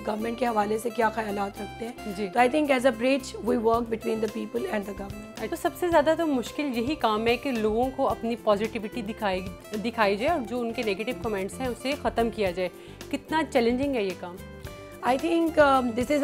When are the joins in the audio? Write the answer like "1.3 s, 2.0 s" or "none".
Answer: none